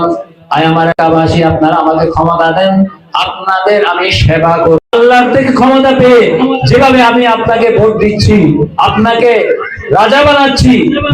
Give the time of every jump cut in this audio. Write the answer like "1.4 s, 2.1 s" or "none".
4.8 s